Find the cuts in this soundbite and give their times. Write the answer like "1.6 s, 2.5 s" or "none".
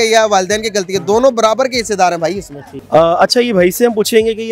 none